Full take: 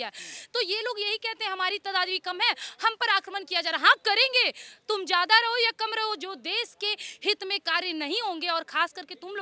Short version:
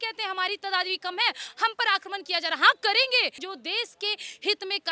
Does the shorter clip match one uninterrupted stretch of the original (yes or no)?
no